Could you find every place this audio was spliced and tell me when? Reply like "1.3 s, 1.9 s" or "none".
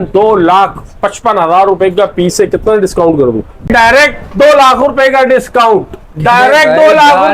3.7 s